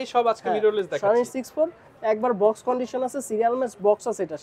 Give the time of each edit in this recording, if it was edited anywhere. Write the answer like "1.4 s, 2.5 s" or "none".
none